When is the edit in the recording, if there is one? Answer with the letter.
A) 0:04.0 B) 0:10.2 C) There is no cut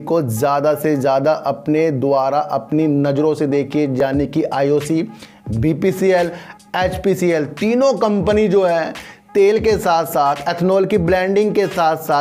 C